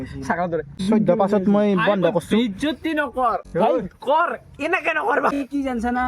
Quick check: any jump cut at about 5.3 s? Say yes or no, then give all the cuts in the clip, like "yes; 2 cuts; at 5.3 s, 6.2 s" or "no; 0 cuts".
yes; 3 cuts; at 0.8 s, 3.4 s, 5.3 s